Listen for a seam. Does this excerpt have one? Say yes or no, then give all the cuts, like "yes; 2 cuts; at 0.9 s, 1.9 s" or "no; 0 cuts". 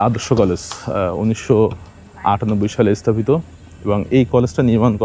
no; 0 cuts